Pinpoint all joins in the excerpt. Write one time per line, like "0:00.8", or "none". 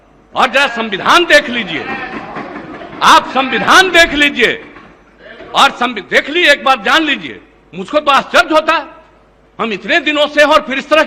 none